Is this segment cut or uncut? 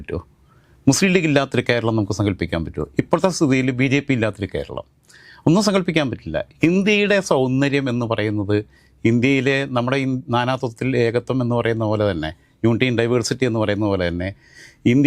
uncut